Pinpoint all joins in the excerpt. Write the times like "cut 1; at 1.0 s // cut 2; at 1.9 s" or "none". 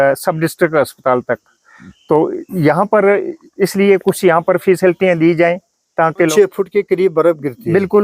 cut 1; at 6.3 s